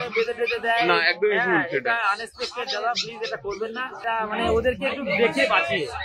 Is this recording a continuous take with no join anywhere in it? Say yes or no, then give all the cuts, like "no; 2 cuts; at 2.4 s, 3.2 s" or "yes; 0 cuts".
no; 1 cut; at 4.0 s